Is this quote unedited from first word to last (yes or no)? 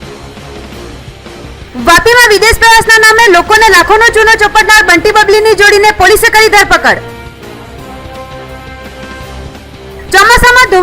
no